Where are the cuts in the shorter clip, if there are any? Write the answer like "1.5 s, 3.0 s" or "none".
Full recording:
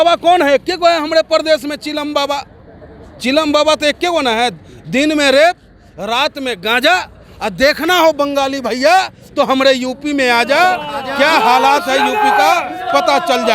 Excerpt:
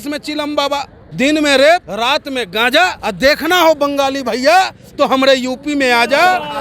1.0 s, 1.9 s, 3.0 s